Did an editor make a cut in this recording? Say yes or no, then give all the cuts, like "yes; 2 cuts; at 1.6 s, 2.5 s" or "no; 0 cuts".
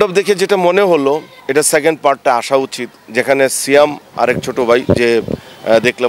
yes; 1 cut; at 1.3 s